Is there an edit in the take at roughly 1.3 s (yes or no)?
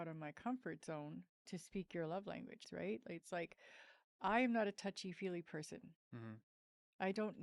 yes